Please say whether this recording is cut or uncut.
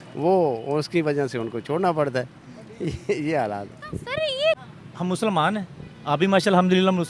cut